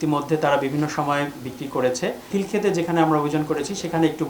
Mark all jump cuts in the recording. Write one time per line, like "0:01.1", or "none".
0:02.3